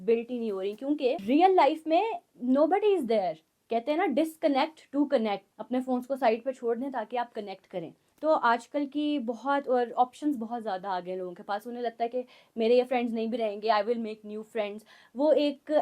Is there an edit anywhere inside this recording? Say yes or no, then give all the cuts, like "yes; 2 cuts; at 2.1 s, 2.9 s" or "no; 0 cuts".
yes; 4 cuts; at 1.2 s, 3.5 s, 5.5 s, 8.0 s